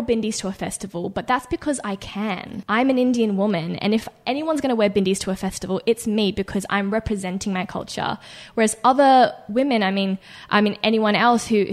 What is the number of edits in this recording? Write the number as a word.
one